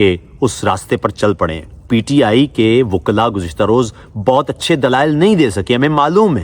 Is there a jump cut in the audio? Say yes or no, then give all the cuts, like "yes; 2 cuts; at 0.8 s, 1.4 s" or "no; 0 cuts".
yes; 1 cut; at 1.8 s